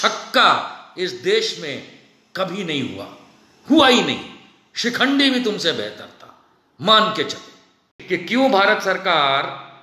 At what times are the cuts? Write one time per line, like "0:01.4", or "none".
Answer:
0:07.9